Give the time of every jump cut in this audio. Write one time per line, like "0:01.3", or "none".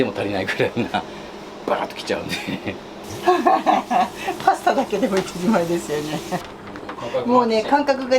0:03.0